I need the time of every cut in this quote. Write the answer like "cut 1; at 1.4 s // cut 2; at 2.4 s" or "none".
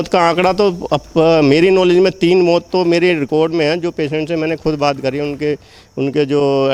none